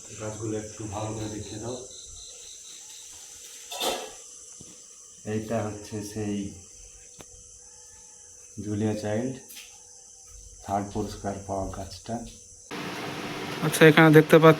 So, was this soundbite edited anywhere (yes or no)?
yes